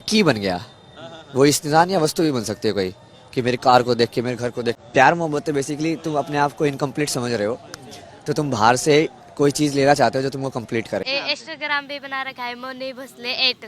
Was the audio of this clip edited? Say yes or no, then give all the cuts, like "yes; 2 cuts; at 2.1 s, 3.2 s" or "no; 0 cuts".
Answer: yes; 2 cuts; at 4.8 s, 11.0 s